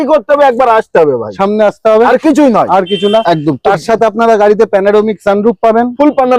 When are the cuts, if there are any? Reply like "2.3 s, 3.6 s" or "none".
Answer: none